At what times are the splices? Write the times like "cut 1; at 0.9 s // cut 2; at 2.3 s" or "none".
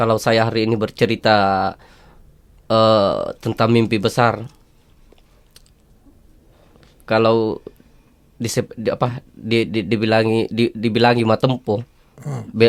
none